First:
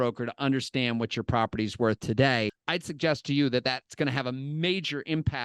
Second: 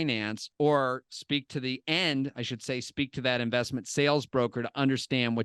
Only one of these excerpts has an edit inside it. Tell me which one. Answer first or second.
first